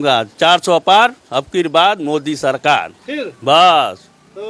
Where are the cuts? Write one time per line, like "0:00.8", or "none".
none